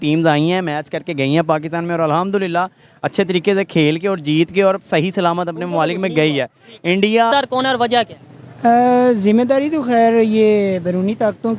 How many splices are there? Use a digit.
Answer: 1